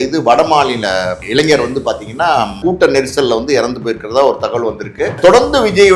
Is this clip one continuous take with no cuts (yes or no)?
no